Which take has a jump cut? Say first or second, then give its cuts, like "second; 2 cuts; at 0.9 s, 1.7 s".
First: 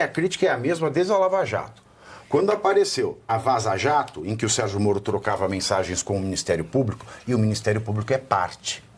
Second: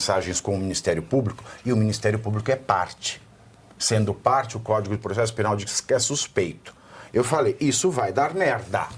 first; 1 cut; at 3.3 s